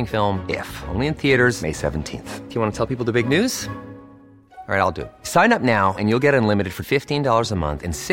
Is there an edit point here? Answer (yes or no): no